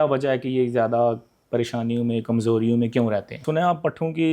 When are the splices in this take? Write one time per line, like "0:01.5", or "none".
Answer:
0:03.4